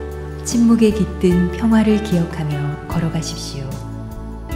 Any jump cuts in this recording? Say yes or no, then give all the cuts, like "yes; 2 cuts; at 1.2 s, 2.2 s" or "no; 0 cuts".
no; 0 cuts